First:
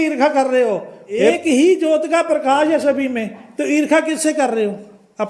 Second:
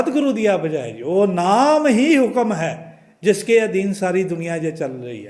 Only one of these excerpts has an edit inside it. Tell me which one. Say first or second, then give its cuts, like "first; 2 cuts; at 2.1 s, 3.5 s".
first; 1 cut; at 1.4 s